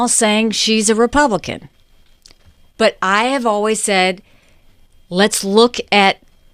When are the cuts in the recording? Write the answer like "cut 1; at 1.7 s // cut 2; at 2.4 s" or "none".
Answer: none